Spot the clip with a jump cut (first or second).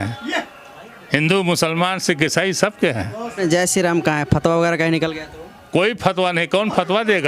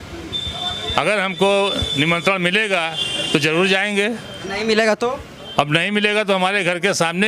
first